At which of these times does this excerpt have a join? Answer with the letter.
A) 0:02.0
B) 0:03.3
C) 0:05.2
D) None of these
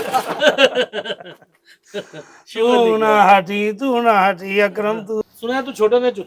C